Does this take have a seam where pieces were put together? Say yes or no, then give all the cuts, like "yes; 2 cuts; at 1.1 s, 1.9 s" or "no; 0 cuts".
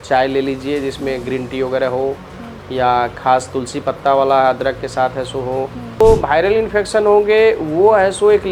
yes; 1 cut; at 6.0 s